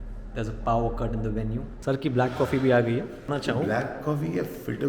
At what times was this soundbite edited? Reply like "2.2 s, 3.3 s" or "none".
1.7 s, 3.3 s